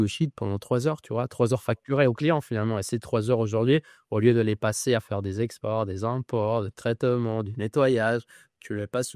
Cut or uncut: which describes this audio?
uncut